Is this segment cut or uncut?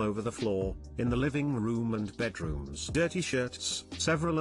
cut